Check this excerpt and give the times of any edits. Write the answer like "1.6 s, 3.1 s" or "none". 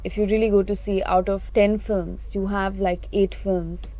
1.4 s